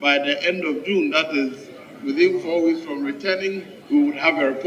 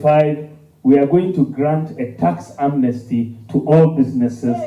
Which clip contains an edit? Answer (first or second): first